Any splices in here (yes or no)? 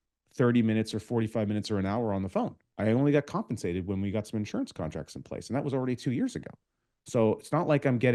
no